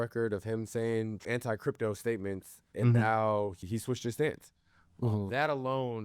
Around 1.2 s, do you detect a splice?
yes; 2 cuts; at 1.2 s, 3.6 s

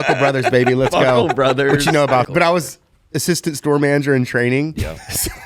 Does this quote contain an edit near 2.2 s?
yes; 1 cut; at 2.2 s

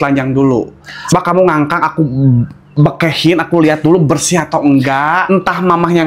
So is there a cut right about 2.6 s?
no; 2 cuts; at 1.1 s, 5.2 s

